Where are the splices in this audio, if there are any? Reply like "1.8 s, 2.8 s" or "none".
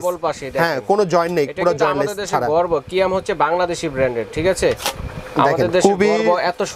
none